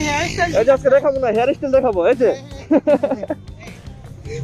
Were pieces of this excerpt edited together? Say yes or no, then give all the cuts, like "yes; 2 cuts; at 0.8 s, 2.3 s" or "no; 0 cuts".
no; 0 cuts